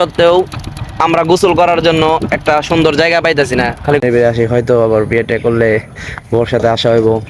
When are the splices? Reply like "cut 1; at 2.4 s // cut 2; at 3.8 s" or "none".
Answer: cut 1; at 4.0 s